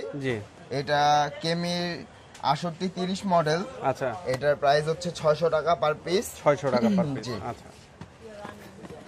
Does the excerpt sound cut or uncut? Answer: uncut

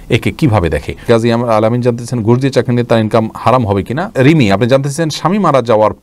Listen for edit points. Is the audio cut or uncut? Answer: cut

